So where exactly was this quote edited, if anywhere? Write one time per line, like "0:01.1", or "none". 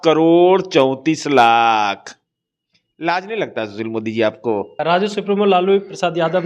0:04.8